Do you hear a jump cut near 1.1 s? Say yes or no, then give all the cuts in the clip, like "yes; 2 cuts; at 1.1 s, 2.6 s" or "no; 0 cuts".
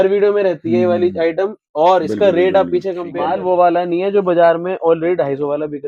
no; 1 cut; at 3.1 s